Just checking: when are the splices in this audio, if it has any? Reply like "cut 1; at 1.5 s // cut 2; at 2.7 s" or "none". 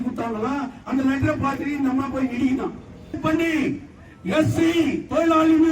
cut 1; at 3.2 s